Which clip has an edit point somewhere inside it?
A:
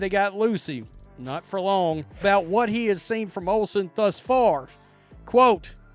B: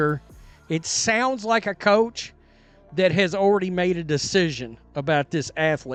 A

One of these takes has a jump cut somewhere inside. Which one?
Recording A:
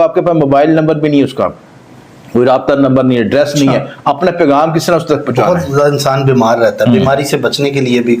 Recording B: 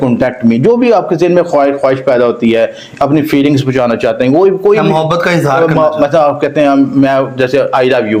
A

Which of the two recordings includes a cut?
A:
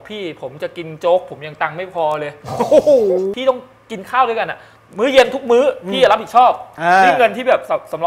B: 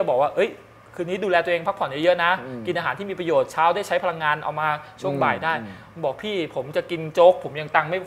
A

